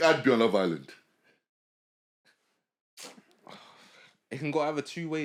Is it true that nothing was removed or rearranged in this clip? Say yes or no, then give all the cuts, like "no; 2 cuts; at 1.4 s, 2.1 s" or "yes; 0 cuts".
yes; 0 cuts